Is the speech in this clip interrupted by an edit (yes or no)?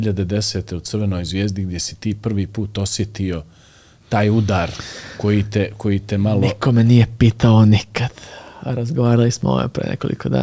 no